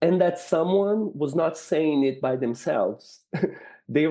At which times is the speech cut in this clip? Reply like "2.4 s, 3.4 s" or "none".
none